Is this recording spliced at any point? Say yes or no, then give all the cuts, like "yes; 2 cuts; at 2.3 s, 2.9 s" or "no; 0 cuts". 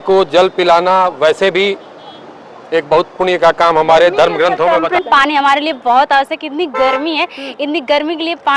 yes; 1 cut; at 5.0 s